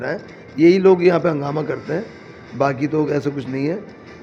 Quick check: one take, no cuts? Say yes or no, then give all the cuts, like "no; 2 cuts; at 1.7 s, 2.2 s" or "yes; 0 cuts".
yes; 0 cuts